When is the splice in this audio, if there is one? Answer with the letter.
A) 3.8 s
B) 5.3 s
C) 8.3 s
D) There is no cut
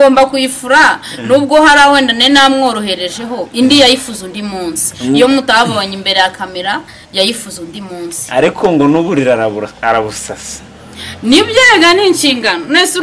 D